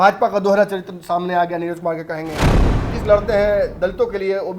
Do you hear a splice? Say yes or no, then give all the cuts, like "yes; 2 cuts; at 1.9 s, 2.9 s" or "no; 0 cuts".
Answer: yes; 1 cut; at 2.5 s